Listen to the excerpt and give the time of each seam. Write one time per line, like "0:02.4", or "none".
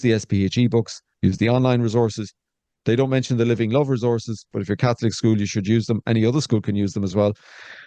none